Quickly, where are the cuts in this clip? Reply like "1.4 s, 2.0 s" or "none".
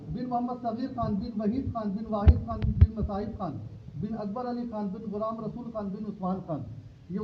none